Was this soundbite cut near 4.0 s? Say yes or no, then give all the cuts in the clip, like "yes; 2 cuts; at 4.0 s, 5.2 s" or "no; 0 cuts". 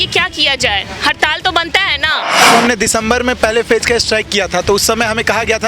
no; 1 cut; at 2.5 s